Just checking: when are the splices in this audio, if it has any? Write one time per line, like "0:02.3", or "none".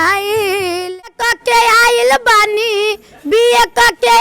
0:01.0

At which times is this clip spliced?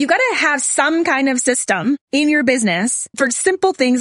0:02.0
0:03.0

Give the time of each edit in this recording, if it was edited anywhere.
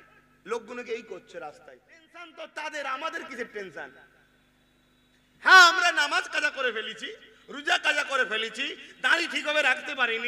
0:02.2

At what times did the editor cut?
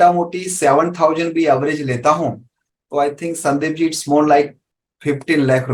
none

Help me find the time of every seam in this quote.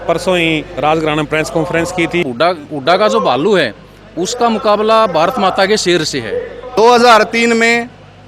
0:02.2
0:06.7

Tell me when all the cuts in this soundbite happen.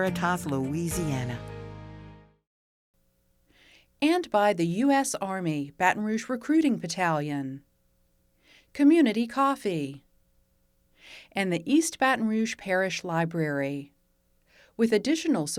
none

